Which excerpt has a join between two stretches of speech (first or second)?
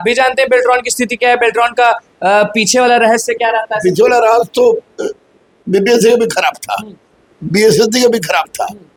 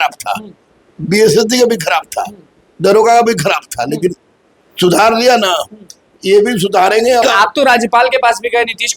second